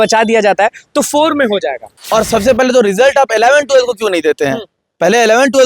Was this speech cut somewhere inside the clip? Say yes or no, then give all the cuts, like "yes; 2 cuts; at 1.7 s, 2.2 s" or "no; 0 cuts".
yes; 1 cut; at 1.9 s